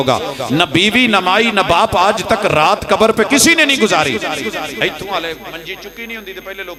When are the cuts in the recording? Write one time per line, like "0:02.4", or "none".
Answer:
none